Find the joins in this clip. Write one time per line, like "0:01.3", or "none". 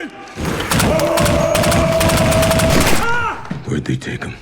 0:00.8
0:02.7

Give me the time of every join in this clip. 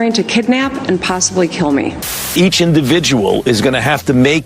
0:02.3

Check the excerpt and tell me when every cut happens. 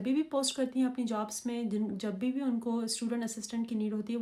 none

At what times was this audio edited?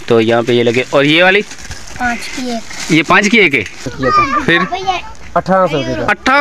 0:03.9

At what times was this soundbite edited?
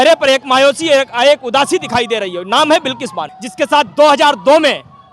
0:03.4

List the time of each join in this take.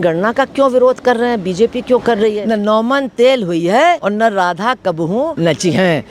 0:02.4
0:04.0
0:05.3

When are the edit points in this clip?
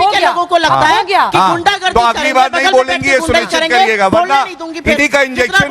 none

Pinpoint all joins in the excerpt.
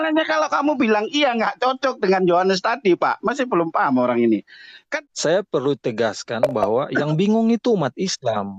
0:04.9

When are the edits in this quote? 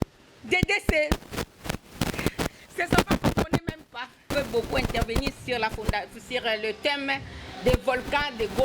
0:04.2

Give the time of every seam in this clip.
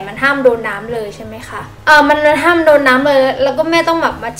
none

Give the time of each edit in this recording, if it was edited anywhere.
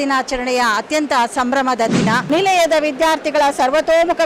0:02.2

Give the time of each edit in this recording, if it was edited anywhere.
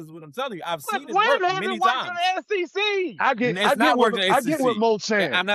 none

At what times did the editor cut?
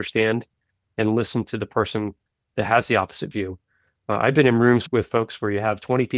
0:04.8

